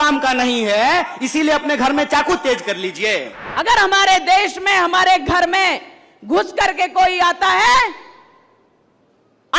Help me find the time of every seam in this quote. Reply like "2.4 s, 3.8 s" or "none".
3.4 s